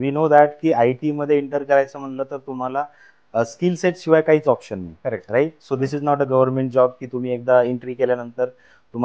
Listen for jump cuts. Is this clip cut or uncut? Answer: uncut